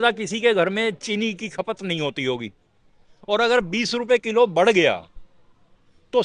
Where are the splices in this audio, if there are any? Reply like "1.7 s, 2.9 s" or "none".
none